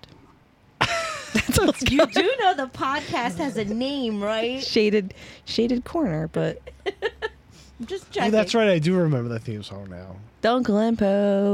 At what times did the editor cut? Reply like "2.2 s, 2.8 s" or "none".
none